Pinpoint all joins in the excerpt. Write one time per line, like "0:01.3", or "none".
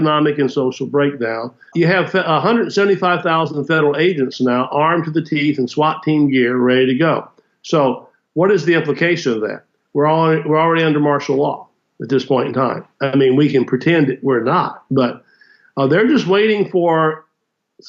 0:01.7